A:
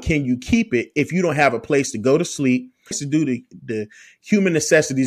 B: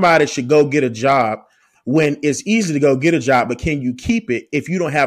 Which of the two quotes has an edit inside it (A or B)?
A